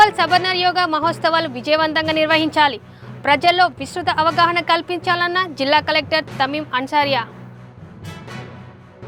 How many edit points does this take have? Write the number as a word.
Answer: zero